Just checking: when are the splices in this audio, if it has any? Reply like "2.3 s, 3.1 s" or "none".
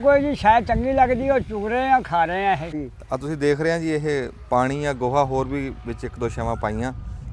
2.7 s